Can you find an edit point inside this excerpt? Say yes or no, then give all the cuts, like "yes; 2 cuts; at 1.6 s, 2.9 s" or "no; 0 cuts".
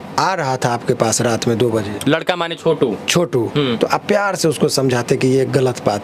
no; 0 cuts